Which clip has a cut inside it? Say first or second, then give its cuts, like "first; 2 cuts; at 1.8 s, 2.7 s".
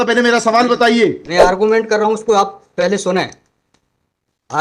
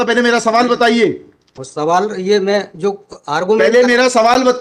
first; 1 cut; at 1.2 s